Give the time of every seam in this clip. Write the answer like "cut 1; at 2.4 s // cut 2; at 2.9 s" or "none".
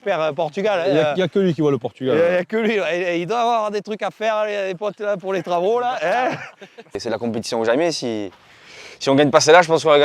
cut 1; at 7.0 s